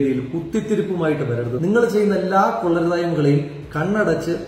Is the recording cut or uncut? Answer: cut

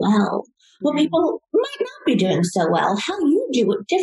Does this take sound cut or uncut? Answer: uncut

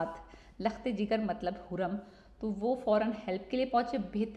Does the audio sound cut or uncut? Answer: uncut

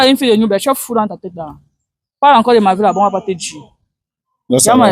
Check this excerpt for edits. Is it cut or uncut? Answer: uncut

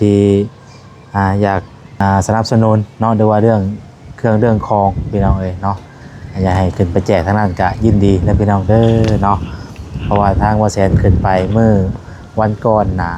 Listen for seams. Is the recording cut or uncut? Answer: cut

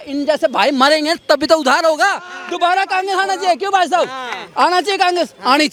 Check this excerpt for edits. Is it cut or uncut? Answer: uncut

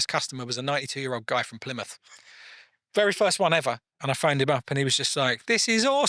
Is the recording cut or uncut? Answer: cut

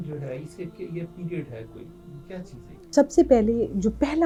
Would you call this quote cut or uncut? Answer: uncut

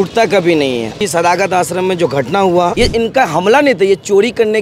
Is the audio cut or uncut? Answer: cut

